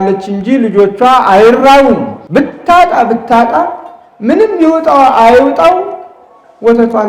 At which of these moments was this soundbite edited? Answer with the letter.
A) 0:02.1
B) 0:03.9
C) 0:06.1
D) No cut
A